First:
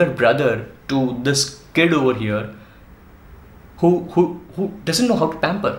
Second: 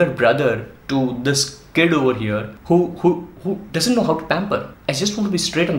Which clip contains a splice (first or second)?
second